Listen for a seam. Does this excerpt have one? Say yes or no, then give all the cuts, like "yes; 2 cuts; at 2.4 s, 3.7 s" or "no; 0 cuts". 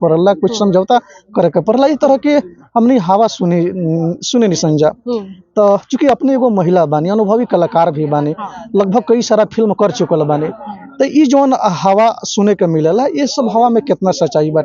no; 0 cuts